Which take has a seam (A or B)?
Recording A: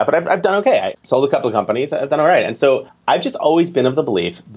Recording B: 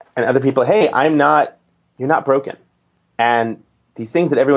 A